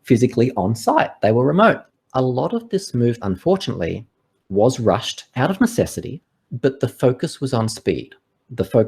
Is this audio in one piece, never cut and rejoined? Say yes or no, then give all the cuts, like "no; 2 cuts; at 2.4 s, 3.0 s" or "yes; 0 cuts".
no; 2 cuts; at 1.9 s, 3.2 s